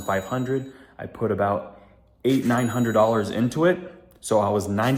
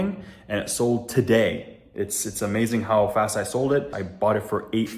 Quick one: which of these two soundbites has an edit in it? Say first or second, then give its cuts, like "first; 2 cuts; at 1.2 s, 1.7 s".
second; 1 cut; at 4.0 s